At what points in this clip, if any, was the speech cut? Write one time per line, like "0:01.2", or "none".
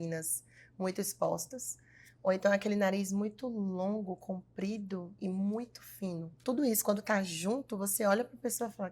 0:06.4